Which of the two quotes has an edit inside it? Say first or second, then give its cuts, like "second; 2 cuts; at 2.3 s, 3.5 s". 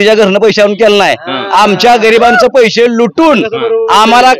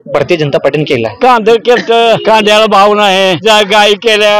second; 3 cuts; at 1.2 s, 2.2 s, 3.4 s